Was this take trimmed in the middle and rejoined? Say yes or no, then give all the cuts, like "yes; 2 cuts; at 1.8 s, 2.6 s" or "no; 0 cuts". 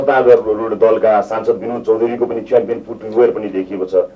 no; 0 cuts